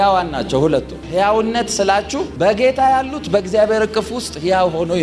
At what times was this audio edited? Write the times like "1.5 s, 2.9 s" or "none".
1.0 s